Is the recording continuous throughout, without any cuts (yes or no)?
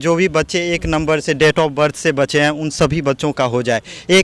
yes